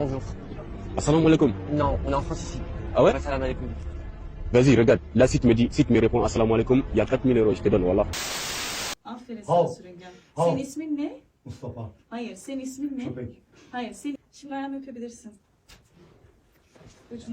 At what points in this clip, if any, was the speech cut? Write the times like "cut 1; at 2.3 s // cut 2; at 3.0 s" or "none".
cut 1; at 8.7 s // cut 2; at 14.2 s